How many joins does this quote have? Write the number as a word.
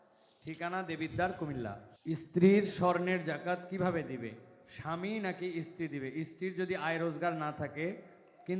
one